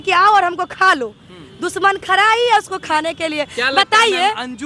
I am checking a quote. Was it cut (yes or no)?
no